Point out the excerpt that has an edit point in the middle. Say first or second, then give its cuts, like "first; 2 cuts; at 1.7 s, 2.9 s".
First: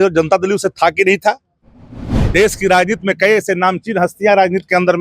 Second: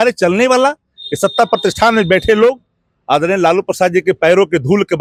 first; 1 cut; at 2.1 s